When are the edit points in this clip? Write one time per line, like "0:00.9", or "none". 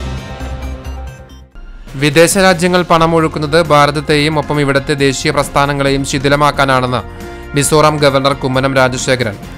0:01.4